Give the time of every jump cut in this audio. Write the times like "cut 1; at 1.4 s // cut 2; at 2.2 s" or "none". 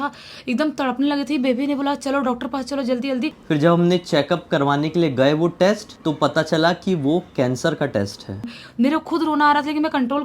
cut 1; at 3.4 s // cut 2; at 5.9 s // cut 3; at 8.5 s